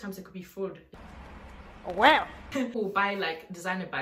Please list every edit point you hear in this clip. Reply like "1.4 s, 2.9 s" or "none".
2.8 s